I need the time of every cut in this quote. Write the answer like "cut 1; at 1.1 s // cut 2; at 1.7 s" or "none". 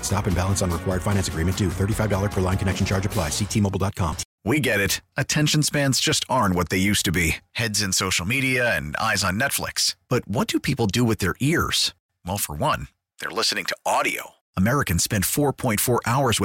cut 1; at 4.3 s